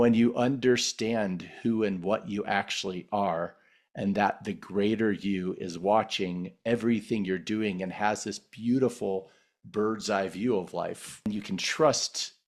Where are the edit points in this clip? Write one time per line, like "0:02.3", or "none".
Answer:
0:11.2